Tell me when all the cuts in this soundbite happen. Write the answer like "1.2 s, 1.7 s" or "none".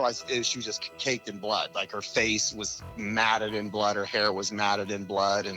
none